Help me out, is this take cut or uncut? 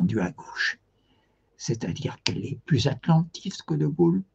cut